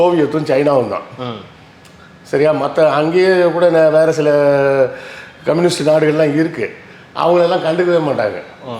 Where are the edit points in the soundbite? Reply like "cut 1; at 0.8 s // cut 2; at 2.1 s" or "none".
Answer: none